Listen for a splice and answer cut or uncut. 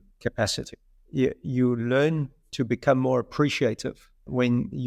uncut